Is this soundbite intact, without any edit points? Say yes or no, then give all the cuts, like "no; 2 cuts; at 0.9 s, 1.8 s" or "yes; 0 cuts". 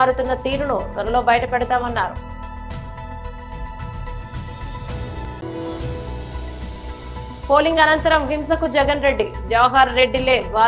yes; 0 cuts